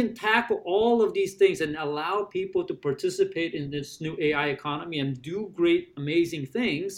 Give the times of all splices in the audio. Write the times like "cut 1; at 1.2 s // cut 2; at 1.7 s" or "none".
none